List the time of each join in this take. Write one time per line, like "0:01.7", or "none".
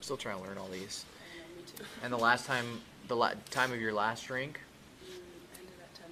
none